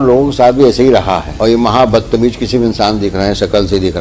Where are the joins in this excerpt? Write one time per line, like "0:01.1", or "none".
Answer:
0:01.3